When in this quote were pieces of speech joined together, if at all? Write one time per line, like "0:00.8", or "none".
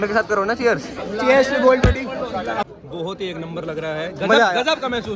0:02.8